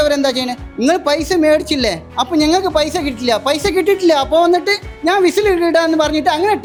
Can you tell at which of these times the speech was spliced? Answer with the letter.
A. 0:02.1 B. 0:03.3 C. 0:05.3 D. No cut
D